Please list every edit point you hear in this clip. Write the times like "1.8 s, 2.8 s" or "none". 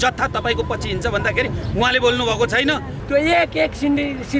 3.0 s